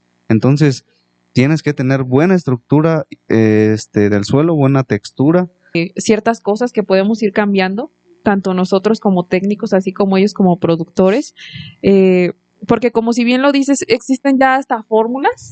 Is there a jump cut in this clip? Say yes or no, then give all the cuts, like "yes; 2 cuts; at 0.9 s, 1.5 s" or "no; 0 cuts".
yes; 1 cut; at 5.8 s